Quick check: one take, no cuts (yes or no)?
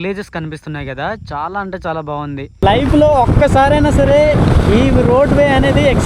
no